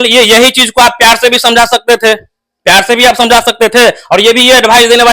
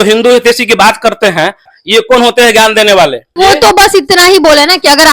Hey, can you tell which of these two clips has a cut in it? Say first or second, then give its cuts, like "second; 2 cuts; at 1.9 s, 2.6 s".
second; 2 cuts; at 1.7 s, 3.4 s